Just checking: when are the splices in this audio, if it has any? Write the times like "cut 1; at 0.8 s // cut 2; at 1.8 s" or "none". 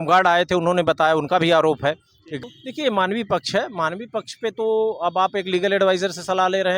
cut 1; at 2.4 s